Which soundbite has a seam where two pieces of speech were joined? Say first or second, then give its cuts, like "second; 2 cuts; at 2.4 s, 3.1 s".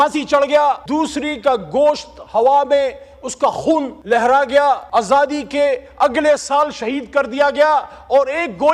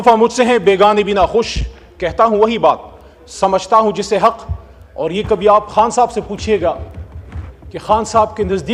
first; 3 cuts; at 0.8 s, 3.9 s, 4.8 s